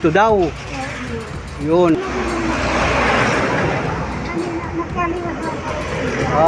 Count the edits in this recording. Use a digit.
1